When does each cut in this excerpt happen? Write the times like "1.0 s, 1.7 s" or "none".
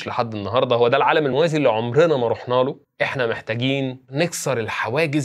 4.1 s